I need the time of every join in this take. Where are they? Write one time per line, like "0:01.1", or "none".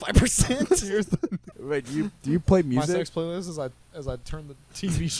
0:01.5